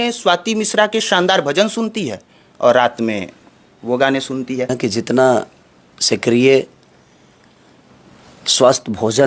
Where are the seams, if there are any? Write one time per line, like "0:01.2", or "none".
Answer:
0:04.8